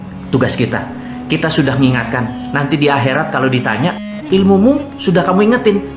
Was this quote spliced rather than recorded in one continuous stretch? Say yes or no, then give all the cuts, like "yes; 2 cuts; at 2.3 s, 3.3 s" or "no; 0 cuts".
yes; 1 cut; at 4.1 s